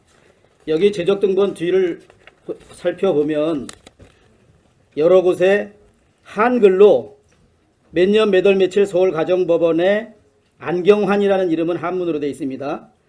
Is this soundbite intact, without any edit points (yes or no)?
no